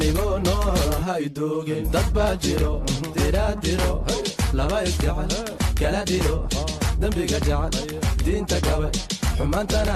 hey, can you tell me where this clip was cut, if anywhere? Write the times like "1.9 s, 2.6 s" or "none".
none